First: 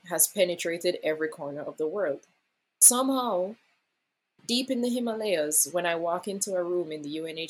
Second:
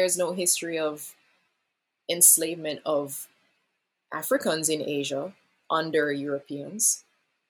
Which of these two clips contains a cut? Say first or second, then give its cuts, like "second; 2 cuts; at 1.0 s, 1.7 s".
first; 1 cut; at 2.8 s